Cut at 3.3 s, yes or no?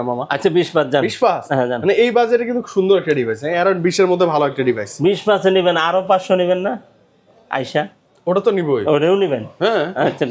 no